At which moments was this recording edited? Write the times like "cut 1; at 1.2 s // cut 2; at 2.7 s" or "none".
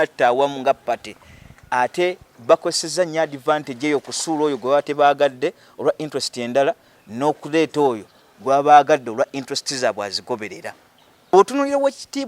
cut 1; at 11.3 s